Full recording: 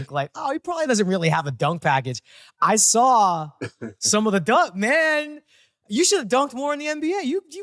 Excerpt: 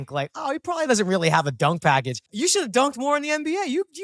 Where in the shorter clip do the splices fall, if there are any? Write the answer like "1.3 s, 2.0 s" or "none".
2.2 s